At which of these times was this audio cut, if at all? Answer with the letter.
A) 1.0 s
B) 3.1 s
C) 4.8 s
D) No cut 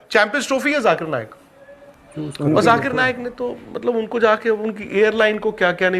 A